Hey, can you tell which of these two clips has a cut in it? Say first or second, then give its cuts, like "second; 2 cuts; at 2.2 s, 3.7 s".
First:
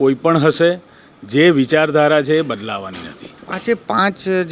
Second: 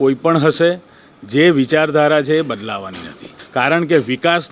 second; 1 cut; at 3.4 s